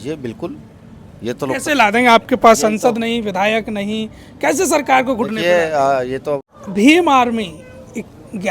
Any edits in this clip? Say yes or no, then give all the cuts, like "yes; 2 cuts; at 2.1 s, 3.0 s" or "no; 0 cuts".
yes; 1 cut; at 6.4 s